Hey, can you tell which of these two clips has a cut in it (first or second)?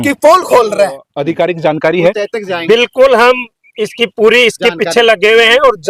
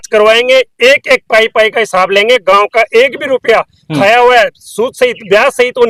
first